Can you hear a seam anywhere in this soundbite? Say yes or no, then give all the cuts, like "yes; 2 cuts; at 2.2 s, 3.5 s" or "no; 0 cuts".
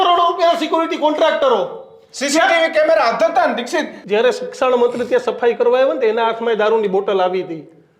yes; 1 cut; at 4.0 s